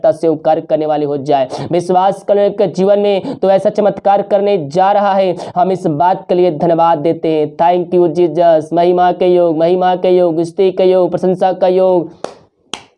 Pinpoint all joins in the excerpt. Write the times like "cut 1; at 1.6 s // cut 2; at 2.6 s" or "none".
none